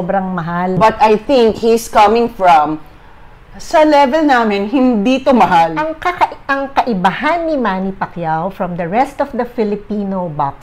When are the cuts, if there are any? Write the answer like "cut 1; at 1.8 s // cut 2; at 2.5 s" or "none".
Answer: cut 1; at 0.8 s // cut 2; at 5.8 s